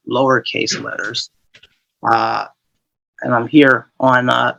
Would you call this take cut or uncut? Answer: uncut